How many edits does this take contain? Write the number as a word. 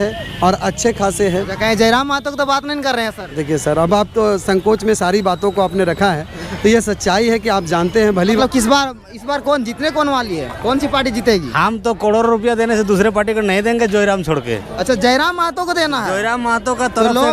one